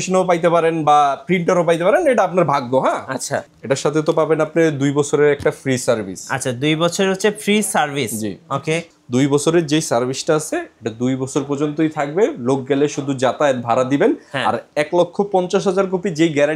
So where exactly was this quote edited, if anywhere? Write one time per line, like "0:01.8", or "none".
0:03.5
0:08.9